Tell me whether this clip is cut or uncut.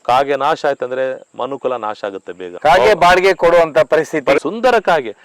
cut